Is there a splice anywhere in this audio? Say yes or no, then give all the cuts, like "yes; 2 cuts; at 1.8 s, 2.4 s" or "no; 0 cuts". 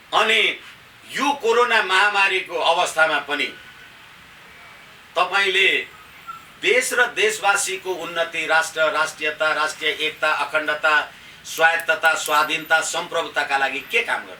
no; 0 cuts